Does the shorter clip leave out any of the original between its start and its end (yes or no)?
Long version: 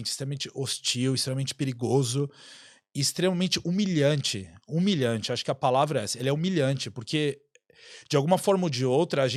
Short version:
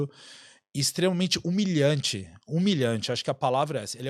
no